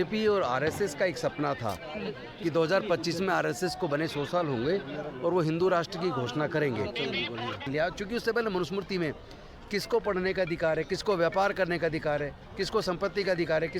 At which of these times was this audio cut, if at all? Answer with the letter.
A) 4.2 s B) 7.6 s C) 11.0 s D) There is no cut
B